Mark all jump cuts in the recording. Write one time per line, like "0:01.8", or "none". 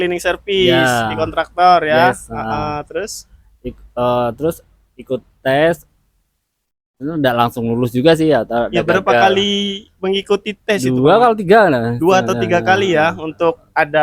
none